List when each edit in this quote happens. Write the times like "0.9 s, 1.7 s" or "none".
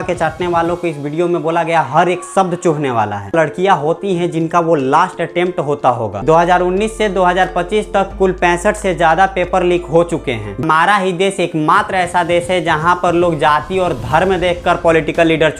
3.3 s, 6.1 s, 10.6 s